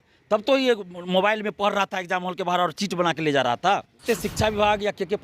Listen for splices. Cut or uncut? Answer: cut